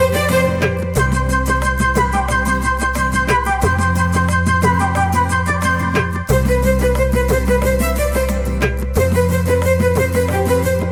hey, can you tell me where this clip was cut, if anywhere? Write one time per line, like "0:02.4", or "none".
none